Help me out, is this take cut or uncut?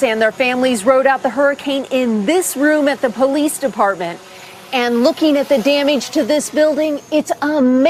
uncut